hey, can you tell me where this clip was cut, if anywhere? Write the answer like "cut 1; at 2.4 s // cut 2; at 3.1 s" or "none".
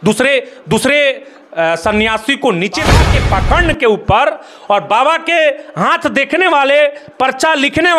cut 1; at 3.0 s